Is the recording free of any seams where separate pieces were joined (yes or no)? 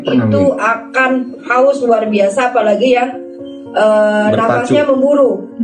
yes